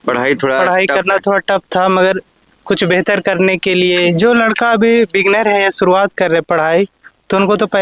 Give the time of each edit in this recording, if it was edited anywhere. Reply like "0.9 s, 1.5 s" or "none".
4.1 s